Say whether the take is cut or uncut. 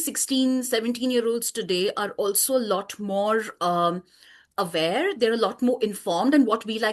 uncut